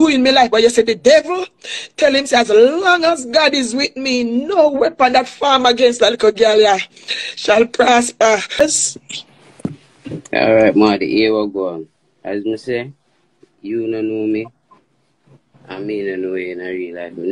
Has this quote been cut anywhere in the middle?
yes; 1 cut; at 8.6 s

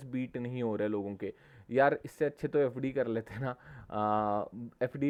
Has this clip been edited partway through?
no; 0 cuts

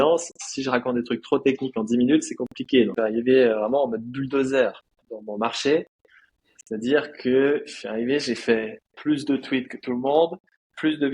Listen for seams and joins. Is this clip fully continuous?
no; 1 cut; at 2.9 s

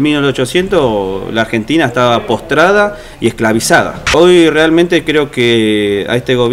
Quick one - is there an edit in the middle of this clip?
yes; 1 cut; at 4.0 s

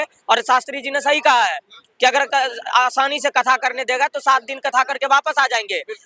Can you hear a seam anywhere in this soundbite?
no; 0 cuts

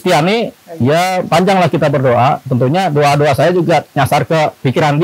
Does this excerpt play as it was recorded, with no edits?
yes; 0 cuts

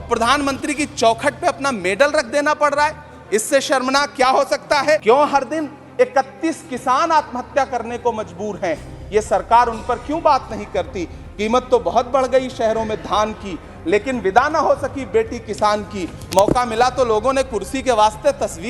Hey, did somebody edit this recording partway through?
no; 0 cuts

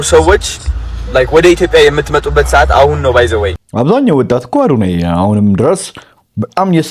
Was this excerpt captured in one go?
no; 1 cut; at 3.6 s

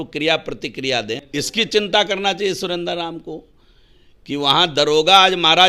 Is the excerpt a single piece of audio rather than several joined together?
no; 1 cut; at 1.2 s

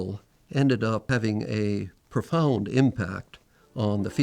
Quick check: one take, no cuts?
no; 1 cut; at 1.1 s

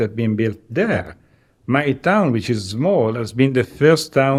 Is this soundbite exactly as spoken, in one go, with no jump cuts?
yes; 0 cuts

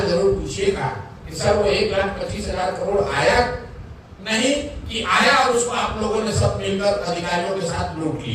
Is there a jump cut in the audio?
no; 0 cuts

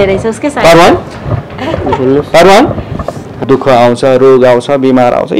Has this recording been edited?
yes; 1 cut; at 3.3 s

